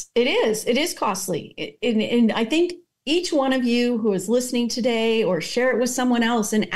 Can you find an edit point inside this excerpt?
no; 0 cuts

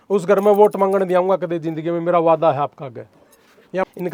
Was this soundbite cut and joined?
no; 0 cuts

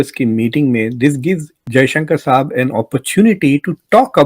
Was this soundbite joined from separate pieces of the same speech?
yes; 1 cut; at 1.6 s

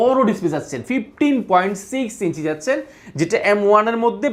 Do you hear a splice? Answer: no; 0 cuts

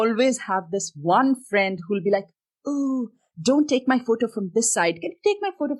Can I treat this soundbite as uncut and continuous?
yes; 0 cuts

